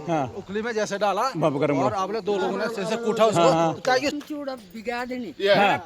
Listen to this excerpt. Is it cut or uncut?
cut